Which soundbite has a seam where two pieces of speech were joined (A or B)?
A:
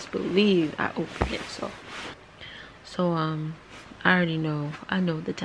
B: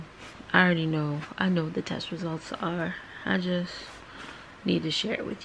A